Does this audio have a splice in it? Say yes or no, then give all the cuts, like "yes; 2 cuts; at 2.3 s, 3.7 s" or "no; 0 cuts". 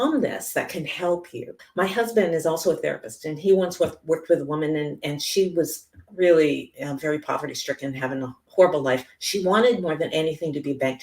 yes; 1 cut; at 1.6 s